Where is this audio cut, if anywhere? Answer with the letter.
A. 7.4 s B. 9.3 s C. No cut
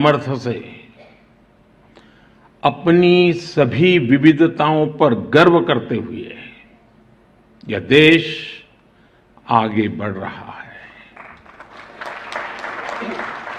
C